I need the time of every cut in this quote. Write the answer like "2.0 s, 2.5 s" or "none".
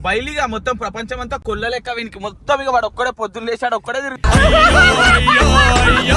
none